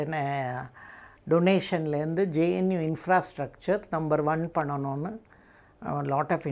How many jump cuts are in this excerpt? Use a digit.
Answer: 0